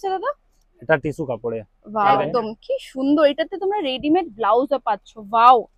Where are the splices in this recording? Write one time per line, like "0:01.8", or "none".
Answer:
0:02.3